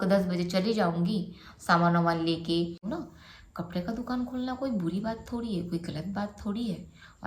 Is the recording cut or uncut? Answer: cut